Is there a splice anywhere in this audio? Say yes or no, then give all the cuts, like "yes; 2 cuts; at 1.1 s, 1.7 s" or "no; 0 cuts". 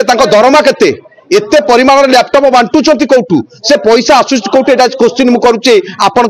no; 0 cuts